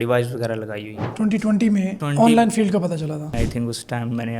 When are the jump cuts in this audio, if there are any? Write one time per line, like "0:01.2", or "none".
0:02.0
0:03.3